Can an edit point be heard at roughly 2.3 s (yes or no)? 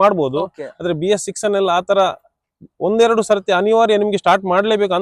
no